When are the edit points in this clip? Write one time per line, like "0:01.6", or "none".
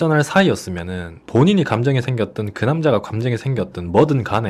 none